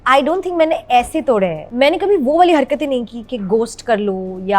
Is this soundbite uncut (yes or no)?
no